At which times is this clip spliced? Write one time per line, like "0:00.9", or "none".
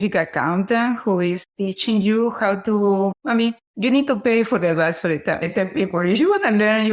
0:05.4

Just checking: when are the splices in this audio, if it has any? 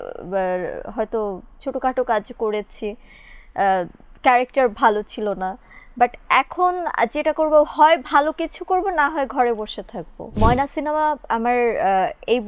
0:10.3

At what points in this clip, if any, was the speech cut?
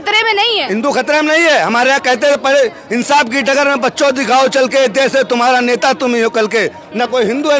none

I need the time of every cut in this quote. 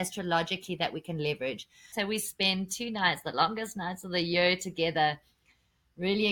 0:01.9

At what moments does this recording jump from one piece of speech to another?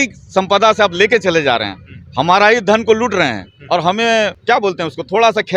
0:04.4

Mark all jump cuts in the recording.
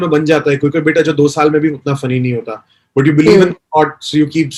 none

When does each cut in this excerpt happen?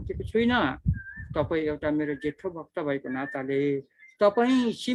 none

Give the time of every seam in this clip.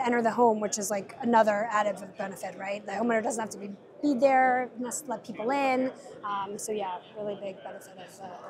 none

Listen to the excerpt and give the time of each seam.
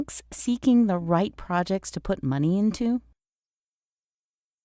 none

